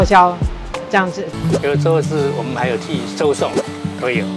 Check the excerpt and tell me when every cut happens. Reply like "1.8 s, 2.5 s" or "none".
1.3 s